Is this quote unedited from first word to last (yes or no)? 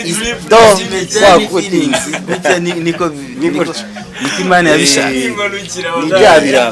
yes